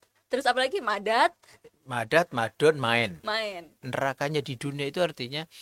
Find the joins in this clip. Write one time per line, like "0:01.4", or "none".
0:03.8